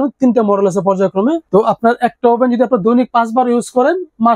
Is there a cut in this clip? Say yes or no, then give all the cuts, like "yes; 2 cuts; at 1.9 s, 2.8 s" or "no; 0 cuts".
yes; 1 cut; at 1.4 s